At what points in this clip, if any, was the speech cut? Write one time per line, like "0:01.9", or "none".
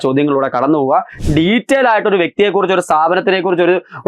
0:01.1